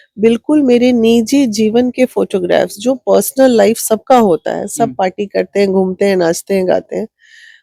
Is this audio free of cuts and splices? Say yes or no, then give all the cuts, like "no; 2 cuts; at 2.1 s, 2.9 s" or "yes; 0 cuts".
yes; 0 cuts